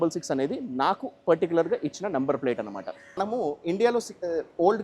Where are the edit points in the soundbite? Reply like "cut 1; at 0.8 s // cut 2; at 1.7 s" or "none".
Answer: cut 1; at 3.2 s